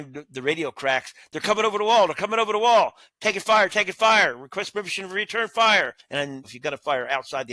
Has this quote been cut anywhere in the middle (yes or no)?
no